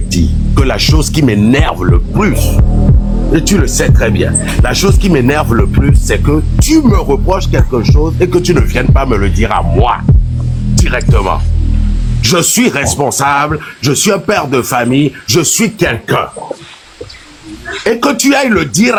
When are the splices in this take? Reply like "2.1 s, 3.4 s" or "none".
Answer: none